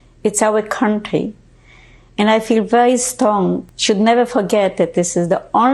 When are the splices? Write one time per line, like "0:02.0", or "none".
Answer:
0:03.7